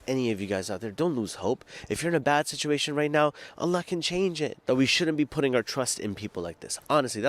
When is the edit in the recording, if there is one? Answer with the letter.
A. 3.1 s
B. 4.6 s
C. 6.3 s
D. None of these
B